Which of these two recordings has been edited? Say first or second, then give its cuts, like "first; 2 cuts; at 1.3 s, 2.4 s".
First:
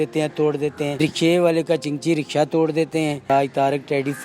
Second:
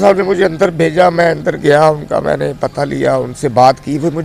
first; 2 cuts; at 0.9 s, 3.3 s